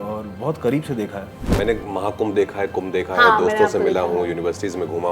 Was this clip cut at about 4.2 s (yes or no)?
no